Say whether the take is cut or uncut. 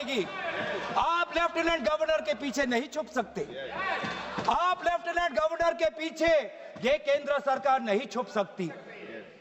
uncut